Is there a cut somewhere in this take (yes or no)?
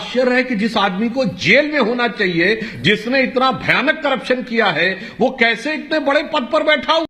no